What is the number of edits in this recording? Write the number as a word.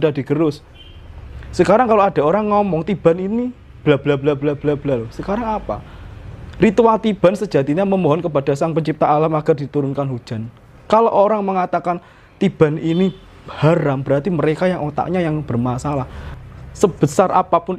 one